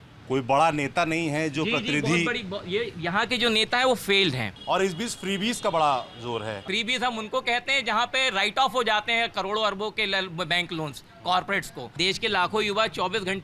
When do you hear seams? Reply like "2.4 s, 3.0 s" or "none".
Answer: 4.5 s, 6.6 s, 11.8 s